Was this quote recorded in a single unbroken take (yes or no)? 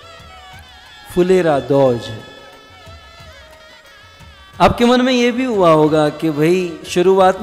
yes